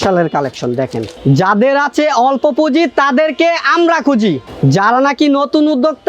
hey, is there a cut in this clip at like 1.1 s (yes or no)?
yes